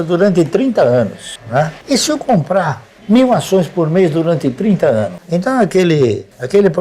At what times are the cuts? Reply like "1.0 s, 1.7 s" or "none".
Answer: 1.8 s, 5.2 s